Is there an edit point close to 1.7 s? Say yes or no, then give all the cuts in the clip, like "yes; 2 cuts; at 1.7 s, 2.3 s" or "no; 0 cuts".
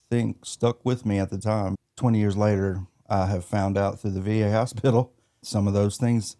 yes; 2 cuts; at 1.7 s, 5.5 s